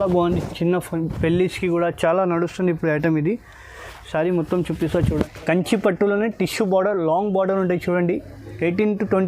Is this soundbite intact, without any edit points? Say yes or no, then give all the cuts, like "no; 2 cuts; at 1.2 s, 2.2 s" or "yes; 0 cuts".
no; 1 cut; at 5.1 s